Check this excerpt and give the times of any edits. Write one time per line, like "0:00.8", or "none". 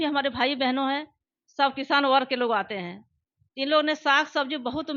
none